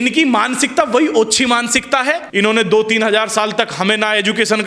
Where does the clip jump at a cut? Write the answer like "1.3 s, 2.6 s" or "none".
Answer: 2.2 s